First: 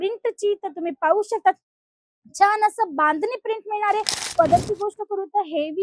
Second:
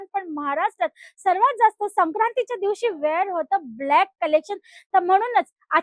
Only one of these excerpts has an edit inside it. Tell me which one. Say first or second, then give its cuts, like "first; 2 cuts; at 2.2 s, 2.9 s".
first; 1 cut; at 4.2 s